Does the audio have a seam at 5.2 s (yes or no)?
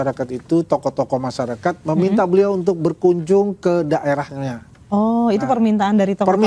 no